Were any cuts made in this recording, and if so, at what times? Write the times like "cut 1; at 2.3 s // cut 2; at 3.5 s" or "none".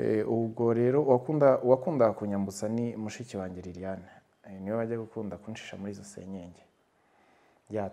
none